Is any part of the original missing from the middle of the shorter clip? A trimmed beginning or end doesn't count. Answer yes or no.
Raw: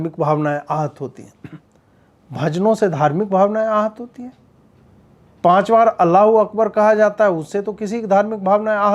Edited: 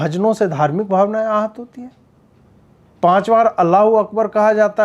no